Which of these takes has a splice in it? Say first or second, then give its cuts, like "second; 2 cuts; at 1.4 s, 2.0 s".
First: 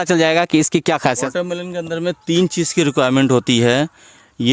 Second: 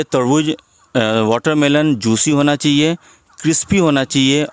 first; 1 cut; at 1.3 s